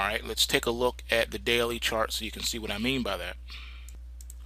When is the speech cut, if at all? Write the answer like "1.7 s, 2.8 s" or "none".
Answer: 1.0 s